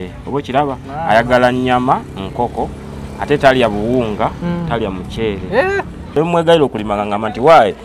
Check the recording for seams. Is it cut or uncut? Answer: cut